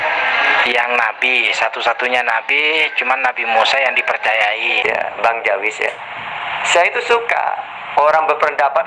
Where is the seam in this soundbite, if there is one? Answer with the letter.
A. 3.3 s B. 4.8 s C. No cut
B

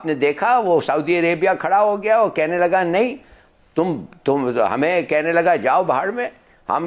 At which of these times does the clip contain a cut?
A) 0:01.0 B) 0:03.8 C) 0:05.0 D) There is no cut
D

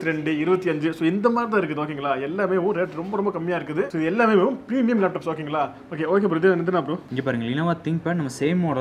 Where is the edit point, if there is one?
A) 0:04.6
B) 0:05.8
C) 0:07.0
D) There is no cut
C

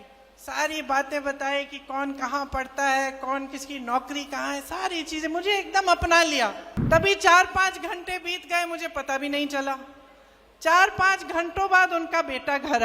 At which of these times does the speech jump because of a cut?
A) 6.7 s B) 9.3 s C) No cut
A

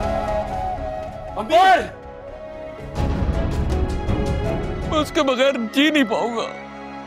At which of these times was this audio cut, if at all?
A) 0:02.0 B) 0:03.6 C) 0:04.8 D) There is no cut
C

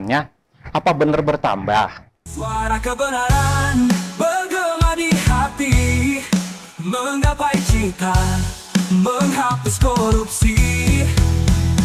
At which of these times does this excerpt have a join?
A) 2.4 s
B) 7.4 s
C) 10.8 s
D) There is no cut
A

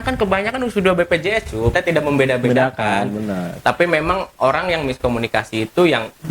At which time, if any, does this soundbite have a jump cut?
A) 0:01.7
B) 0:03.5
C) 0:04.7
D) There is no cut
A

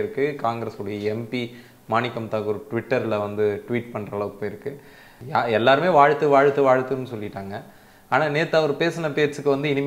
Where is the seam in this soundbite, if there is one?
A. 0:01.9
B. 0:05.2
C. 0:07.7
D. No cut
B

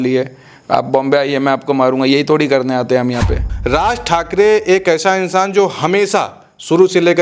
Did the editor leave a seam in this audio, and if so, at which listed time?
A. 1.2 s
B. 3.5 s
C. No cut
B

